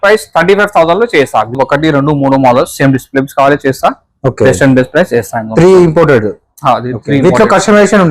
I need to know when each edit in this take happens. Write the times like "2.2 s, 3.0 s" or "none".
1.5 s